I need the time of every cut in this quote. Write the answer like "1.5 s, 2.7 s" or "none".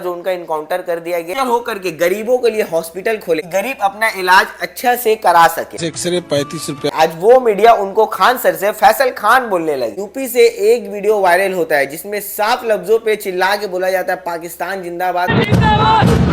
1.3 s, 6.9 s, 9.9 s